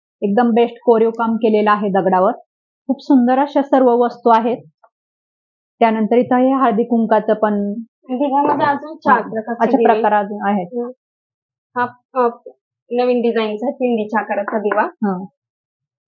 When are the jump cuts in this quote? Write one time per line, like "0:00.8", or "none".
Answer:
none